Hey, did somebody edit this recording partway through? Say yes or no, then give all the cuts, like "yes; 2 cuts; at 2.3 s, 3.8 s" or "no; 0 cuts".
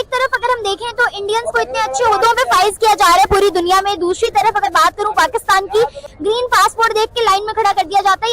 yes; 1 cut; at 6.0 s